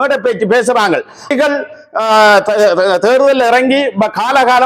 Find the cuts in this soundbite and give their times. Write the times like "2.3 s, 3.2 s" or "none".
1.3 s